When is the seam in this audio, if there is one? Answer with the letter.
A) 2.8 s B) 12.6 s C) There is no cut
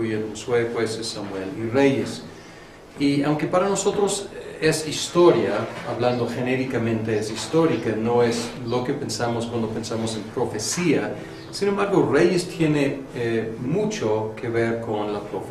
C